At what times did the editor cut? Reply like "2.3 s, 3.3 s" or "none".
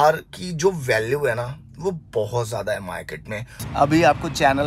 3.6 s